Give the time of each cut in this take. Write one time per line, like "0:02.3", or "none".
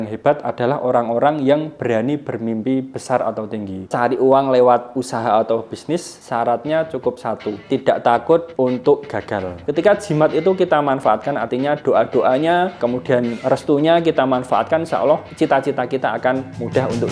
0:03.9
0:09.6